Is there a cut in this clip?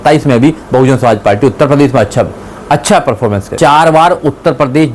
yes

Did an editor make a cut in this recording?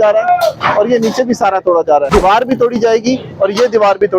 yes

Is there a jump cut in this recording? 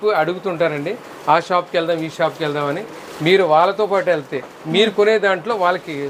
no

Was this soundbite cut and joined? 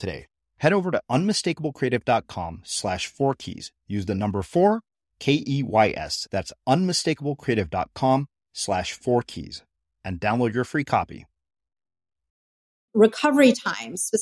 yes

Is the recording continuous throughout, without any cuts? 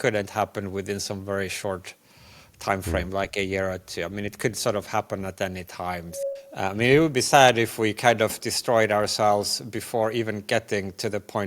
no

